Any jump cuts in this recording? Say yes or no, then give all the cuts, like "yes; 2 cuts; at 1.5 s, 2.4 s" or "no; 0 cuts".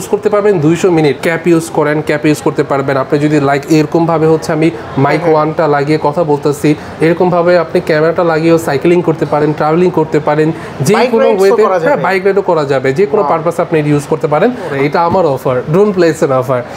yes; 2 cuts; at 1.2 s, 14.7 s